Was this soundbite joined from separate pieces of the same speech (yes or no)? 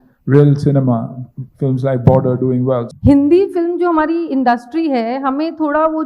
yes